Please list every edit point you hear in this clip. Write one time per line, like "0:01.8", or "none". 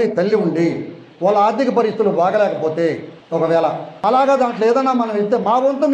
0:03.3